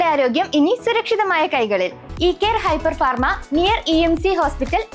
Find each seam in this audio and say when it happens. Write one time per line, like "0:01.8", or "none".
0:02.0